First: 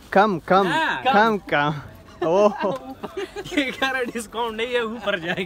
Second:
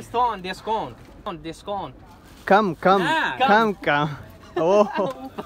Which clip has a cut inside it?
second; 1 cut; at 1.3 s

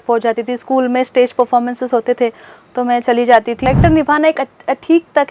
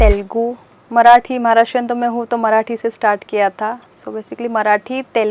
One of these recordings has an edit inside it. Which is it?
first; 1 cut; at 3.7 s

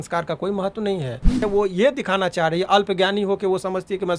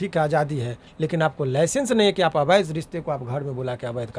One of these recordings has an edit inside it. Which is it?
first; 1 cut; at 1.4 s

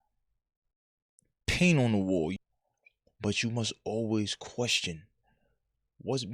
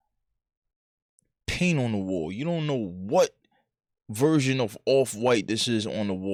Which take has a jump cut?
first; 1 cut; at 2.3 s

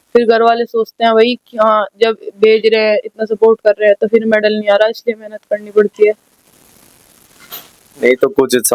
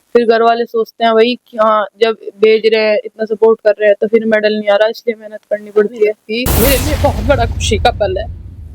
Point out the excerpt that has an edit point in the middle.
second; 1 cut; at 6.3 s

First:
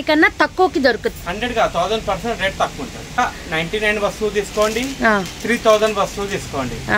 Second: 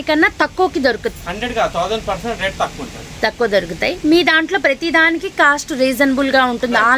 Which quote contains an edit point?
first; 1 cut; at 3.2 s

